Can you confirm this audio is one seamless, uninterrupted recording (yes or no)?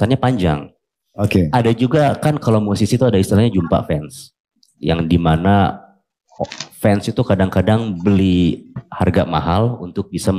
no